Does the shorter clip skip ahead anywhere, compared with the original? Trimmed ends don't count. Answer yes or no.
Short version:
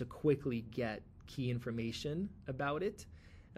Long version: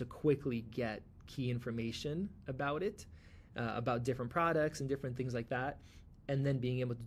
no